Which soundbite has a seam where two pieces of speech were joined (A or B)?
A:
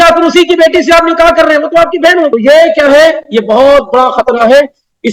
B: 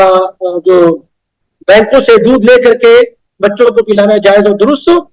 A